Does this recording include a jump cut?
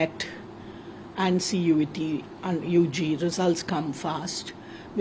no; 0 cuts

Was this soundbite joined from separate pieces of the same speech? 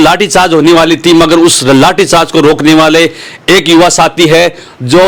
no; 0 cuts

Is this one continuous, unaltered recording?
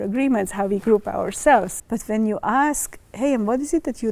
no; 1 cut; at 1.7 s

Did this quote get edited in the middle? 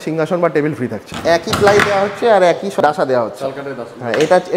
yes; 2 cuts; at 1.1 s, 2.8 s

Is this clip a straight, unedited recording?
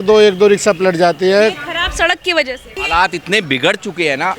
no; 1 cut; at 2.8 s

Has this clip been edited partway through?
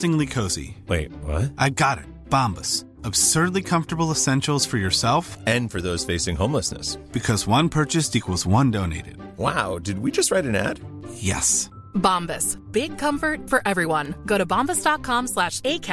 no; 0 cuts

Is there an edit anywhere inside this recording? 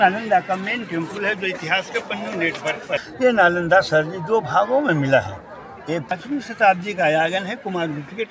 yes; 2 cuts; at 3.0 s, 6.1 s

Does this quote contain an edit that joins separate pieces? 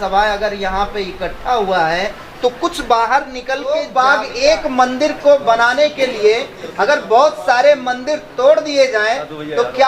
yes; 1 cut; at 3.8 s

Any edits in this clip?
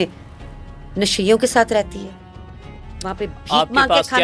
no; 0 cuts

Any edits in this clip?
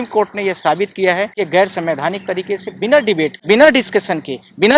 yes; 2 cuts; at 1.3 s, 3.4 s

